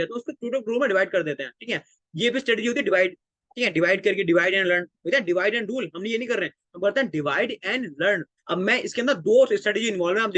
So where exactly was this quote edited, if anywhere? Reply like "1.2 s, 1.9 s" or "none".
8.3 s